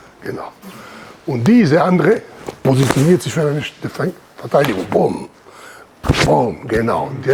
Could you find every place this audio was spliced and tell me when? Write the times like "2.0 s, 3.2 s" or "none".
none

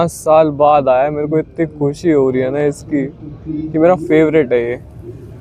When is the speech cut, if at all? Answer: none

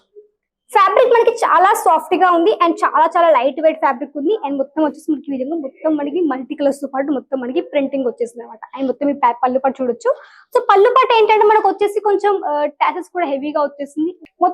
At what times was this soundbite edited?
none

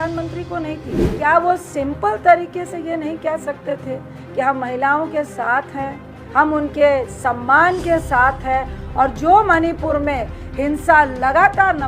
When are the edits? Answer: 1.0 s

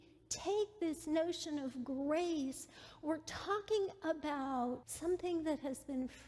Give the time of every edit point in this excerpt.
4.9 s

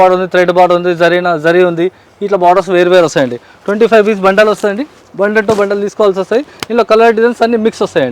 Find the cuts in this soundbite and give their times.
none

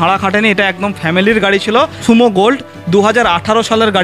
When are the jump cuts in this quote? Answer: 2.0 s

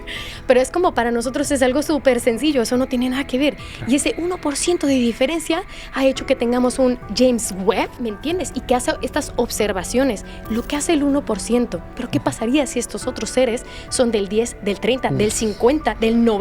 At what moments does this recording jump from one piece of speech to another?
8.0 s, 12.0 s

